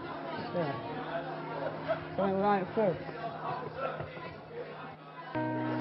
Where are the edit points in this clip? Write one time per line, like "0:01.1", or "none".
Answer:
none